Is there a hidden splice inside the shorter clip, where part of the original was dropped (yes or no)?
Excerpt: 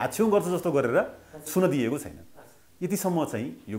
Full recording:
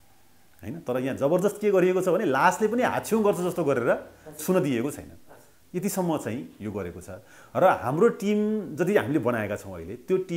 no